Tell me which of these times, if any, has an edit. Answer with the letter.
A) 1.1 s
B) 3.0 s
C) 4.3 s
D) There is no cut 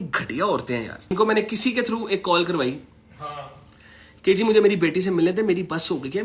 A